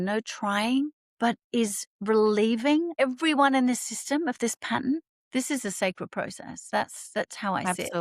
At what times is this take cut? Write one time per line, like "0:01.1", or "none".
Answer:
0:01.0
0:03.0
0:05.1

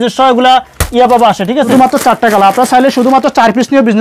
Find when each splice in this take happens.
0:01.7

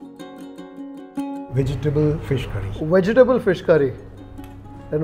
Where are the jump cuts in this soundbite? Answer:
0:01.0

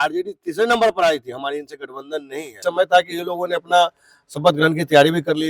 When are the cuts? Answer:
0:02.6

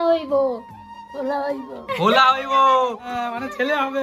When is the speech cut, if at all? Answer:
0:03.1

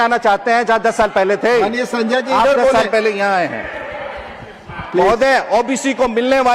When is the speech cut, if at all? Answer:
none

